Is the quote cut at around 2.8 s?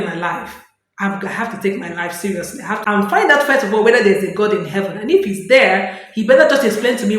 yes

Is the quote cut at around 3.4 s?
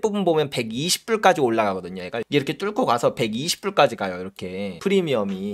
no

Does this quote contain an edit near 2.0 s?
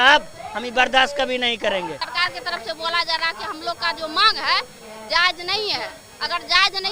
yes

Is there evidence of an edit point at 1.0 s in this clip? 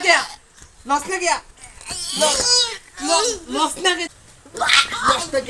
no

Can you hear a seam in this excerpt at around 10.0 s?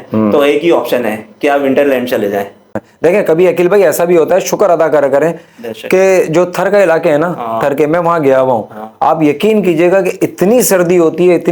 no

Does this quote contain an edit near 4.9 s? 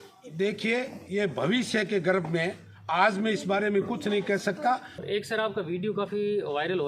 yes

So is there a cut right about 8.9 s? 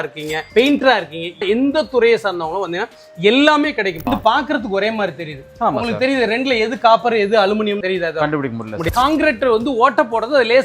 yes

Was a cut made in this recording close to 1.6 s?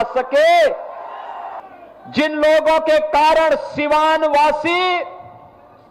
yes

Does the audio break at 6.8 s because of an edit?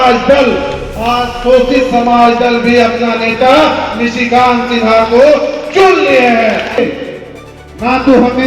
yes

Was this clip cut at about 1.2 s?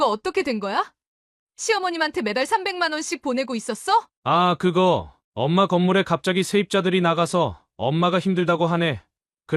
no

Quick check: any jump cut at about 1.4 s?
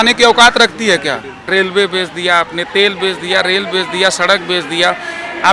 yes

